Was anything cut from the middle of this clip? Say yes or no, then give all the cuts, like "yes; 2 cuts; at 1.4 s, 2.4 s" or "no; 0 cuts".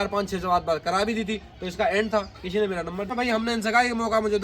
yes; 1 cut; at 3.1 s